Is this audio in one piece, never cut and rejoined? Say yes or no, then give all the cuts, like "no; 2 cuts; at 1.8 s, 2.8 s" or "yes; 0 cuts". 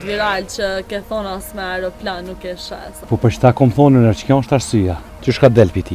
no; 2 cuts; at 3.0 s, 5.1 s